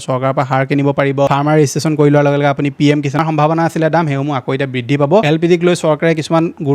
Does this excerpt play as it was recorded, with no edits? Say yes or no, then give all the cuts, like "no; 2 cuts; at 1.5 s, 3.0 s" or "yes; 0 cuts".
no; 3 cuts; at 1.3 s, 3.2 s, 5.2 s